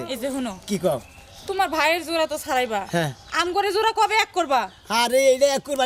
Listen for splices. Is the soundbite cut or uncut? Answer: uncut